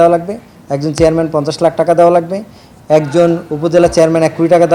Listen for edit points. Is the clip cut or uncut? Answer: uncut